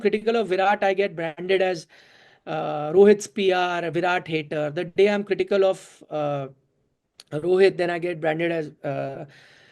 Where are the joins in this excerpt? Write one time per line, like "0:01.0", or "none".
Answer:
none